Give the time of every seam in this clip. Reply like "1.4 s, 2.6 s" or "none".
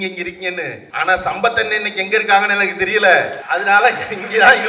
0.8 s, 3.4 s